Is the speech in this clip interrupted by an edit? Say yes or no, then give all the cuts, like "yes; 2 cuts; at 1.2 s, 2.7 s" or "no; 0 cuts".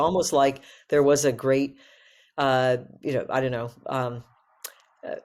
no; 0 cuts